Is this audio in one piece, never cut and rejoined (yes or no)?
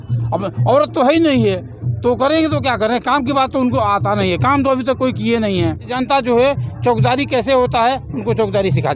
no